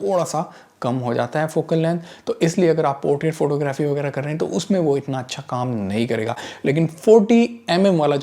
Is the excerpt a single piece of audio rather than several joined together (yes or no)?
yes